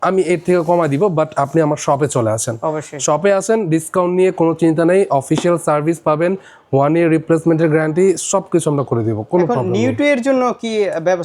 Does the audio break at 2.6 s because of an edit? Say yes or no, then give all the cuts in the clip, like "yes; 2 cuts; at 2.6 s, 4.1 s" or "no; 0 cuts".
no; 0 cuts